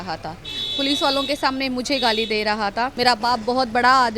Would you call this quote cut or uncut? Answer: cut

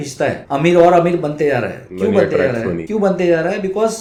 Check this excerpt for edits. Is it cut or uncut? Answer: uncut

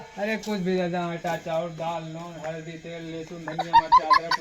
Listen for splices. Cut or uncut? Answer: cut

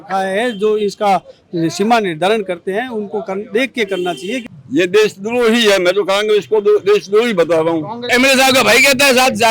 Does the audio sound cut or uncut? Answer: cut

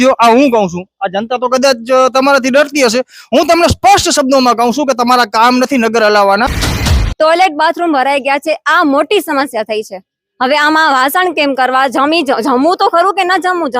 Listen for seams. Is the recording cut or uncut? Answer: cut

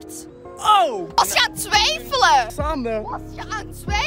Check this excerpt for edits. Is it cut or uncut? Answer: cut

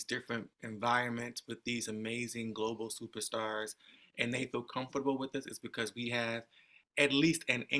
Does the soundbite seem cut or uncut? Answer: uncut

